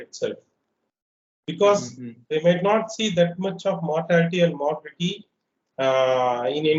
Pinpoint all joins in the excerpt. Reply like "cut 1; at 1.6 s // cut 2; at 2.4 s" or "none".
none